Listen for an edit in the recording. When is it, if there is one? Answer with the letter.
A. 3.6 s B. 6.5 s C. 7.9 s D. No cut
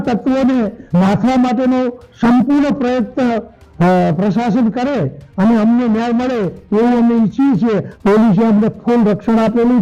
C